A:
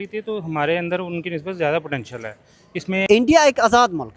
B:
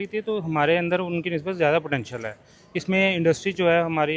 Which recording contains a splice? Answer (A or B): A